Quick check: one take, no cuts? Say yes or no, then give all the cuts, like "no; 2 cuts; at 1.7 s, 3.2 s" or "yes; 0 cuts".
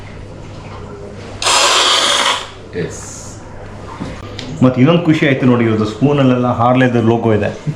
no; 1 cut; at 4.2 s